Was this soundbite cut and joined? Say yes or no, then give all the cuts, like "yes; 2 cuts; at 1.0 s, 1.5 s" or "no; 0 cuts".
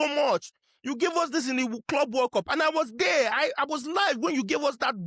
no; 0 cuts